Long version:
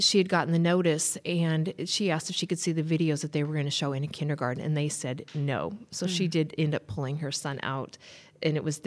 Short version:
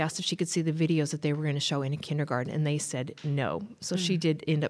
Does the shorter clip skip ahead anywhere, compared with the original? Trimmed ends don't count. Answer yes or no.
no